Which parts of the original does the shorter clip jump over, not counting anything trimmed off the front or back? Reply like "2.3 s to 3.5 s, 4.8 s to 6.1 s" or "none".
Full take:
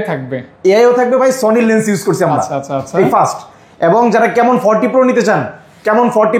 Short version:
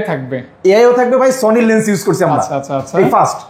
none